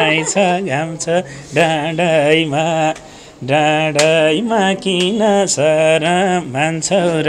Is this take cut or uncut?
uncut